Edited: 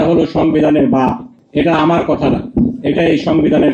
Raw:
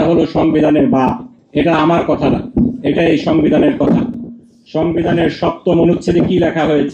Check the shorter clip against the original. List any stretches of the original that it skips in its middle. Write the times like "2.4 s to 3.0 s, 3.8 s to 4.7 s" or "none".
none